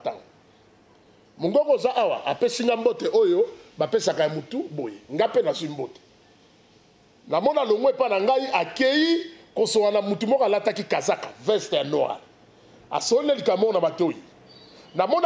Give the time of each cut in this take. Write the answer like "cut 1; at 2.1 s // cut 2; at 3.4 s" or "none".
none